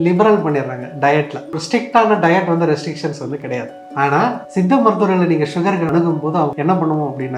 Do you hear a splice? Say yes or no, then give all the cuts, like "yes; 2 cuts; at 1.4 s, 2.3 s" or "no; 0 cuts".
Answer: yes; 2 cuts; at 4.4 s, 6.2 s